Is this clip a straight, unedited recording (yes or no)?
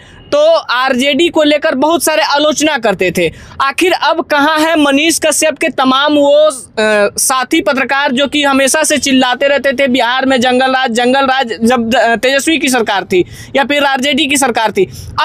yes